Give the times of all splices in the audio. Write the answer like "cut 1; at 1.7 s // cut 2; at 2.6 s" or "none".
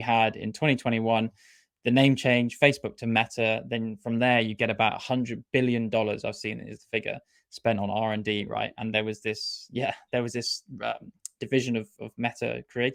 none